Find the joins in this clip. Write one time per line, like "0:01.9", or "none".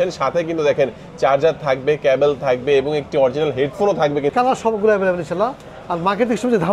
0:04.3